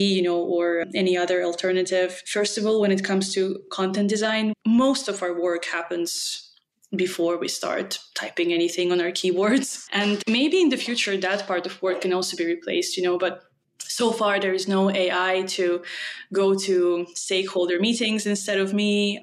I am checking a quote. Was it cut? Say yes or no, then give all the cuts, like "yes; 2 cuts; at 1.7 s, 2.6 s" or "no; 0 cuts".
yes; 2 cuts; at 2.2 s, 10.0 s